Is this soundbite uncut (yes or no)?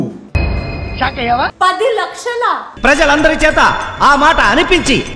yes